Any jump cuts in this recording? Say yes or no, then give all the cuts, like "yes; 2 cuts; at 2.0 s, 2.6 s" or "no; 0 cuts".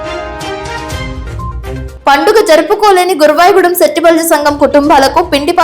yes; 1 cut; at 1.4 s